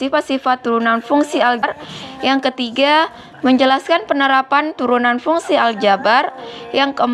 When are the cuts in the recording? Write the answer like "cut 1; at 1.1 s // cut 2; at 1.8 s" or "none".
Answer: cut 1; at 1.6 s